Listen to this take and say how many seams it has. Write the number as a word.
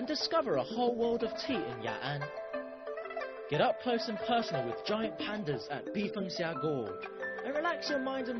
zero